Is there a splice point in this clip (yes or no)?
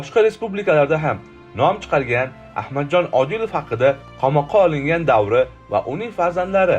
yes